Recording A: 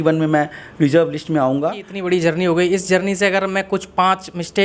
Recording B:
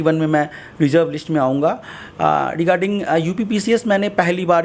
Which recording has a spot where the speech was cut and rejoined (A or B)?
A